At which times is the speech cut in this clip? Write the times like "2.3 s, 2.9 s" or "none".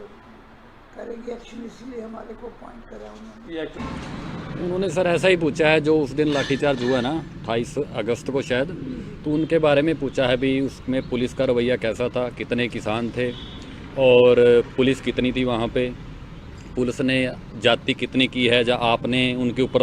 3.8 s